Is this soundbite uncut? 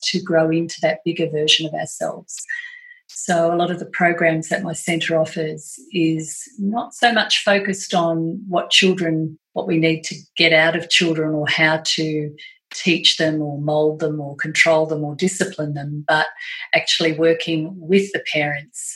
yes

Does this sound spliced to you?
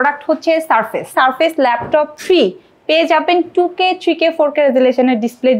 yes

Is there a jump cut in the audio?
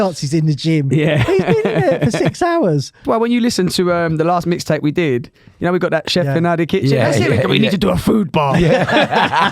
yes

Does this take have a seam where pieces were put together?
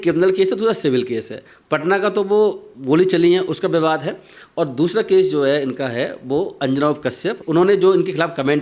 yes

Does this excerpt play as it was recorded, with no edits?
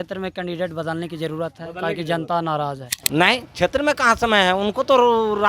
no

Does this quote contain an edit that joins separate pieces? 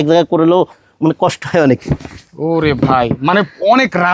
no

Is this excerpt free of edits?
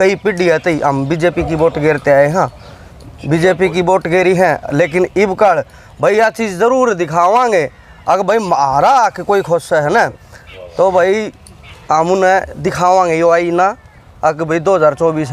yes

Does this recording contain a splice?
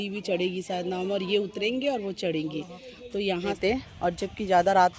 yes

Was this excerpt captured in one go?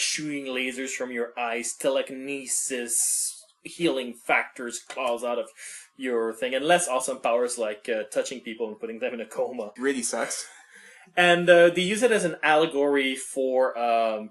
yes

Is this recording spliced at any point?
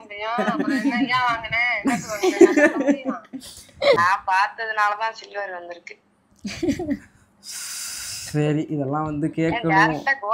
yes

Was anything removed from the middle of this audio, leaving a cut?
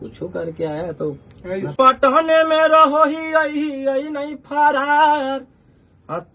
yes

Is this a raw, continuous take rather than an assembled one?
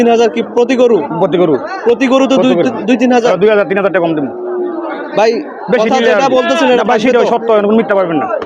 yes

